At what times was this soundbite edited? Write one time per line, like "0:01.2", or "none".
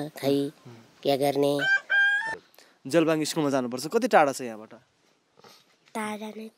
0:02.4